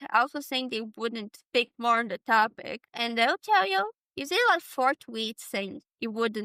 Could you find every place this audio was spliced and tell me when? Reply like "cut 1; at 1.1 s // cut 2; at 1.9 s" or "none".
none